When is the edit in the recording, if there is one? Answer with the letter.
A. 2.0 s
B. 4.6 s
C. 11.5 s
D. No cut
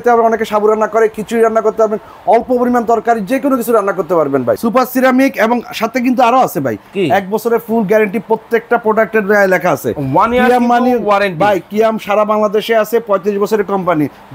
B